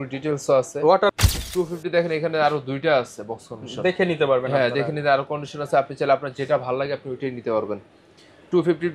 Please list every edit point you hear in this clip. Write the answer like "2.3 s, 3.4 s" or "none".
1.3 s

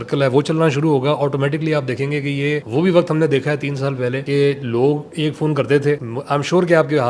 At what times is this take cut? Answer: 2.6 s, 4.2 s, 6.1 s

